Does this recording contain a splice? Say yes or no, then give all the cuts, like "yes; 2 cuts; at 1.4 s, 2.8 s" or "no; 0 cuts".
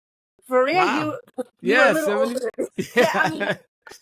yes; 1 cut; at 2.8 s